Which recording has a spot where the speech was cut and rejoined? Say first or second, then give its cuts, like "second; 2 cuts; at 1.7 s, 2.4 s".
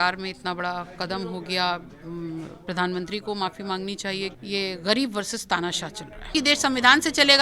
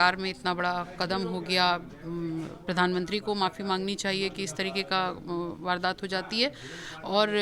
first; 2 cuts; at 4.4 s, 6.3 s